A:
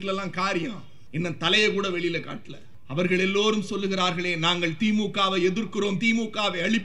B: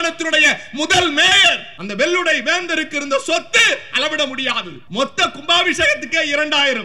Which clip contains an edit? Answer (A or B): B